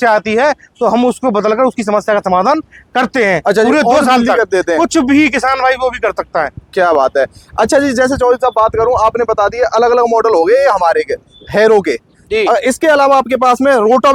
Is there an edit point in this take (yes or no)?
no